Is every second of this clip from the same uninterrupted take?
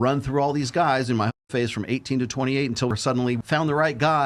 no; 1 cut; at 3.0 s

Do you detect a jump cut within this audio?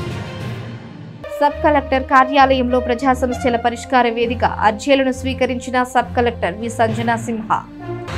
no; 0 cuts

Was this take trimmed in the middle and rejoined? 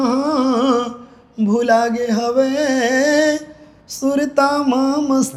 no; 0 cuts

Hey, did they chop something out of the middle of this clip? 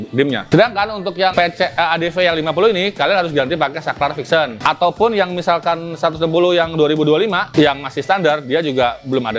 no; 0 cuts

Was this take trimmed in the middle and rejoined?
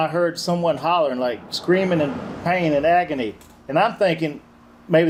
no; 0 cuts

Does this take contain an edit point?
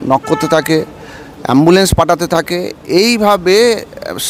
no; 0 cuts

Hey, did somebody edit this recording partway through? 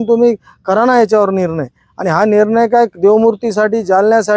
no; 0 cuts

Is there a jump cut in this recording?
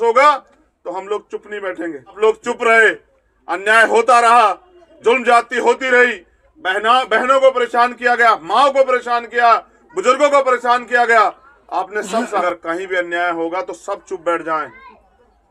yes; 2 cuts; at 2.2 s, 12.4 s

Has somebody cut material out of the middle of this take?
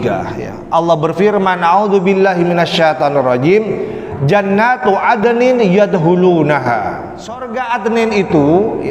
yes; 1 cut; at 7.5 s

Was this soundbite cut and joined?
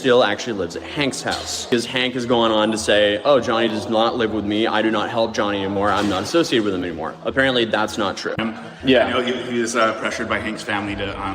yes; 2 cuts; at 1.7 s, 8.4 s

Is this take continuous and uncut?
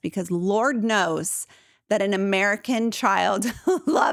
yes; 0 cuts

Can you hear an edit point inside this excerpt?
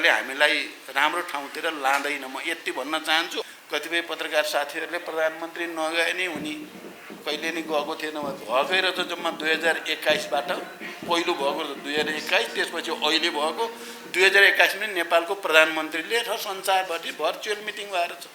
yes; 1 cut; at 3.4 s

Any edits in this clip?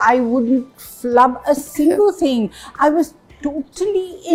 no; 0 cuts

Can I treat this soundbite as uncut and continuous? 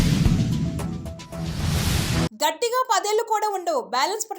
no; 1 cut; at 2.3 s

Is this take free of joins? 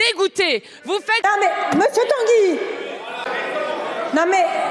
no; 2 cuts; at 1.2 s, 3.2 s

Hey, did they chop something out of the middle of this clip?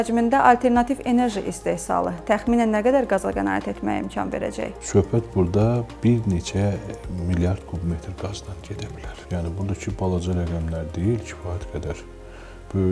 no; 0 cuts

